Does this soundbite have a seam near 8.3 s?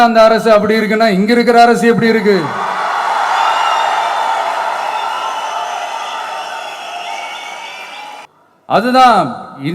yes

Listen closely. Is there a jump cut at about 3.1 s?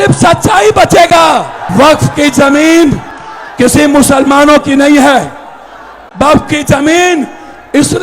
no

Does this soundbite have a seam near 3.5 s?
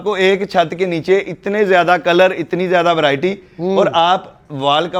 no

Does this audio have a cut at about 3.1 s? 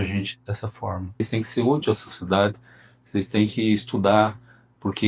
no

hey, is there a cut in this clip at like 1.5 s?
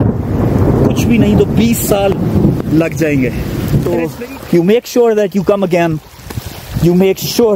no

